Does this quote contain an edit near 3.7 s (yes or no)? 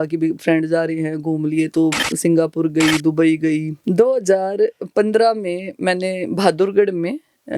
yes